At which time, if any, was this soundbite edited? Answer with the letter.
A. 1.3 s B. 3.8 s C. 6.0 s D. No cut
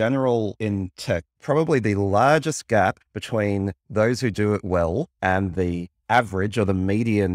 A